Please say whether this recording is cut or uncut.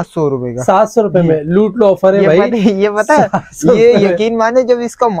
uncut